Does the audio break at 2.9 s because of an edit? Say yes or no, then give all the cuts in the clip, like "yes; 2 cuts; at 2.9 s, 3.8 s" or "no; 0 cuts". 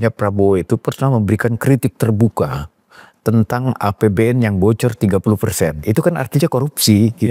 no; 0 cuts